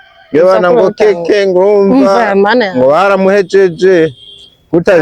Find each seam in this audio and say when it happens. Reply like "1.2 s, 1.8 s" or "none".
none